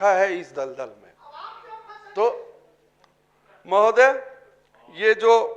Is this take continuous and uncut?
yes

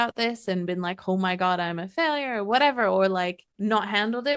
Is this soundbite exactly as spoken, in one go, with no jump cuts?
no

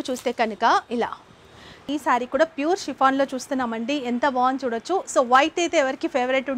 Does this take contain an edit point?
yes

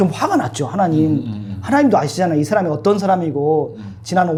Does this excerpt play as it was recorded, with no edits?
yes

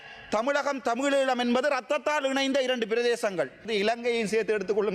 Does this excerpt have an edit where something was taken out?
yes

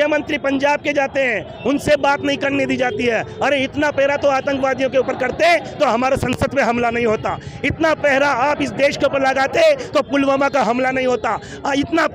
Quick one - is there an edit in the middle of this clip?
no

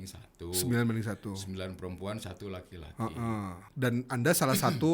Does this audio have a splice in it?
yes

